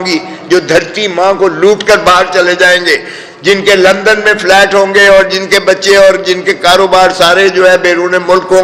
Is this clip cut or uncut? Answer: uncut